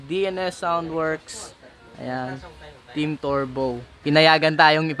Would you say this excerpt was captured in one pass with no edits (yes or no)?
no